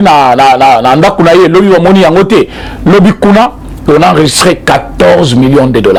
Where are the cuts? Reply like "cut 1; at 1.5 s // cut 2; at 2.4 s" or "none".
none

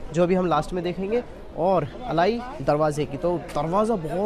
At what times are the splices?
none

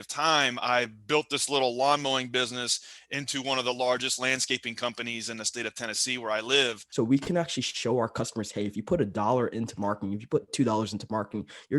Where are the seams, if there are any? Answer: cut 1; at 6.8 s

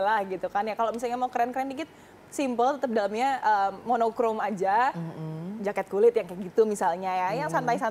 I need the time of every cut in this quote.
none

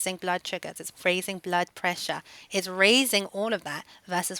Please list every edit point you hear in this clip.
cut 1; at 1.0 s

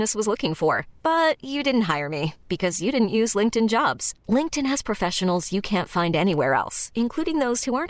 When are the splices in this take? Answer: none

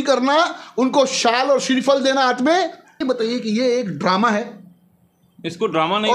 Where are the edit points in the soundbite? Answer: cut 1; at 3.0 s

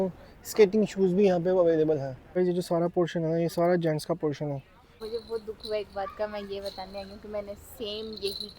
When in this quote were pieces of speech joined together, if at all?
cut 1; at 2.2 s // cut 2; at 5.1 s

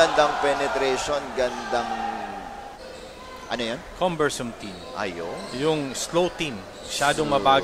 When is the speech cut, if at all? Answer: cut 1; at 2.8 s

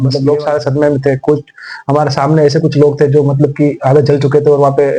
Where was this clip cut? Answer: none

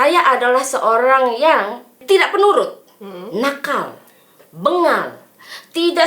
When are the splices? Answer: cut 1; at 2.0 s

